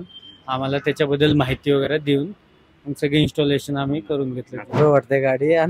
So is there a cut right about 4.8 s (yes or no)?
yes